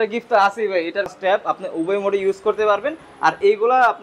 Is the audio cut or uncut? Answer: cut